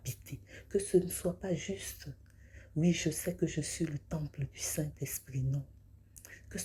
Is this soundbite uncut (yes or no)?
yes